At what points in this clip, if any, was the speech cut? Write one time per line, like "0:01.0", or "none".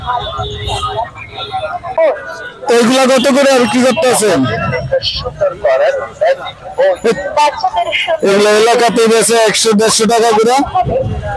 0:01.9